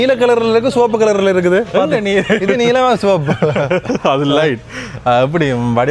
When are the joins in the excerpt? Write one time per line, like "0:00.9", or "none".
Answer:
none